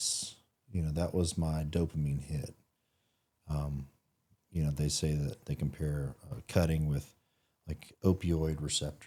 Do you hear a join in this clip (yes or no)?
no